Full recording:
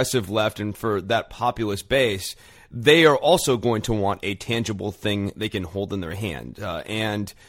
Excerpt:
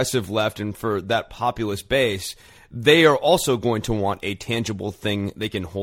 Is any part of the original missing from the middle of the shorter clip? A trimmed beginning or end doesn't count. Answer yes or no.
no